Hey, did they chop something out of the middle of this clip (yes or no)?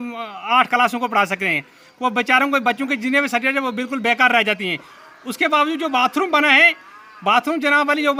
no